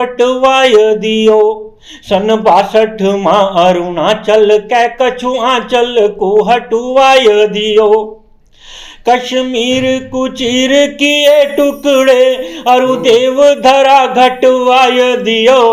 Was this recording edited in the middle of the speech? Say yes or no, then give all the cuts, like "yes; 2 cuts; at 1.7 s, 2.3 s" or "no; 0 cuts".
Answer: no; 0 cuts